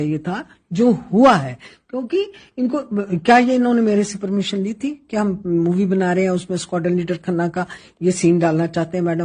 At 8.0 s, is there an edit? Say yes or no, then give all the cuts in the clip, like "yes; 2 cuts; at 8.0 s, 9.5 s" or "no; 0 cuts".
no; 0 cuts